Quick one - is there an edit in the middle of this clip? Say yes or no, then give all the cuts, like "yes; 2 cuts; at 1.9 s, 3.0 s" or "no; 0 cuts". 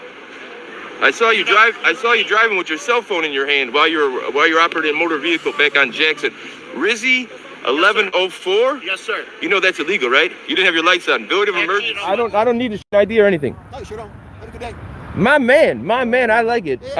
yes; 1 cut; at 11.9 s